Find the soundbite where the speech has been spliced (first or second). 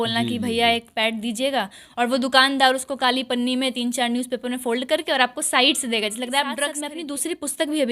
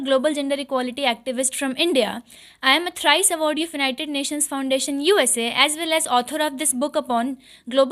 first